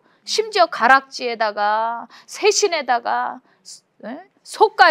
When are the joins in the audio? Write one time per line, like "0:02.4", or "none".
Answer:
none